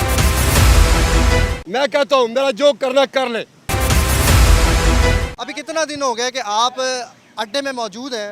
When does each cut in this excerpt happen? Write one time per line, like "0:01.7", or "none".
0:01.6
0:03.7
0:05.3